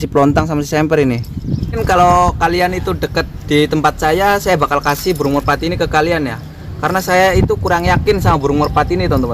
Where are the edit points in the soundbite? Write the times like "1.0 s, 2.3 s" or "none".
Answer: 1.7 s